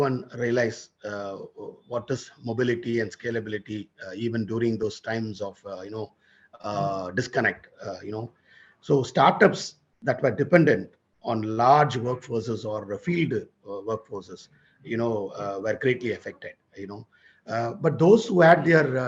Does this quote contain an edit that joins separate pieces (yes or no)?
no